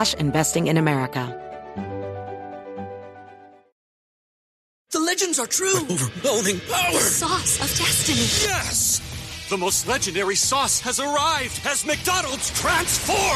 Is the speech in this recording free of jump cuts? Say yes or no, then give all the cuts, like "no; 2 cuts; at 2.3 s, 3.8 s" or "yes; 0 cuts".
no; 1 cut; at 1.3 s